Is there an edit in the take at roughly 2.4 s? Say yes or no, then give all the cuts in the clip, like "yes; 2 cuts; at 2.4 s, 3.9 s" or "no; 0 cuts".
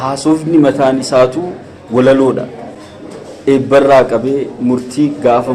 no; 0 cuts